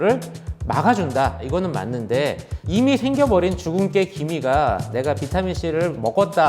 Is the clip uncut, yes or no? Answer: no